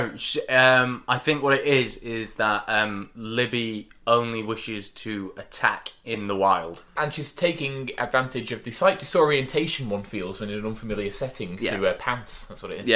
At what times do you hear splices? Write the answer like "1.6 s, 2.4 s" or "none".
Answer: 6.9 s